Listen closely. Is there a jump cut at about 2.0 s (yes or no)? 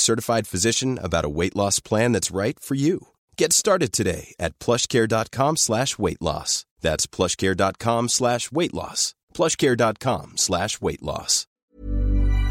no